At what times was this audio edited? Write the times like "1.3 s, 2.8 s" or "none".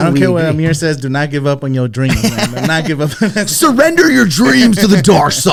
none

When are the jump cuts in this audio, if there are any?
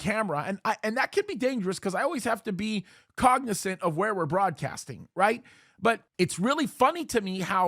6.1 s

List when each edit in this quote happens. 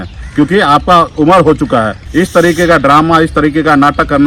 2.0 s

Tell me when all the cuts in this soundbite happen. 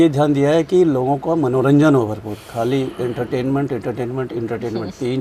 none

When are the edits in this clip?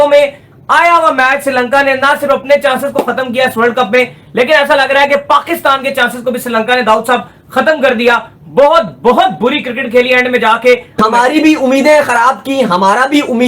10.9 s

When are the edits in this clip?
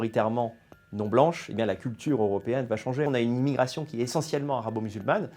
3.1 s

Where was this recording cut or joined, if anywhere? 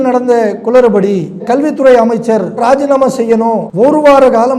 3.7 s

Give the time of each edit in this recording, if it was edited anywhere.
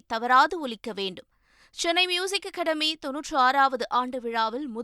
none

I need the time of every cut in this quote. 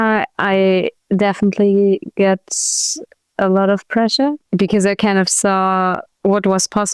1.0 s, 4.5 s, 6.1 s

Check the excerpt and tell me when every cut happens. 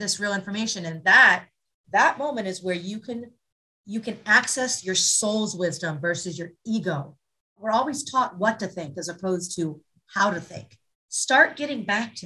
7.6 s

